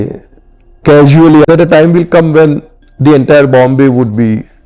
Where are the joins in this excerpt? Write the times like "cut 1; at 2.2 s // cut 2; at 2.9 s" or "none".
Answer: cut 1; at 1.4 s